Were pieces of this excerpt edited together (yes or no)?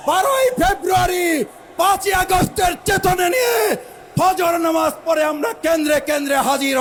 no